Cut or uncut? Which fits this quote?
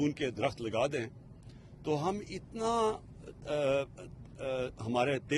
uncut